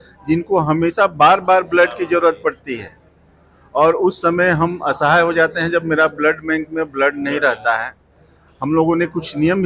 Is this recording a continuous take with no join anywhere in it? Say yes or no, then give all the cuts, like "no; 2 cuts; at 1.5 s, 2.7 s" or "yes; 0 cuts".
yes; 0 cuts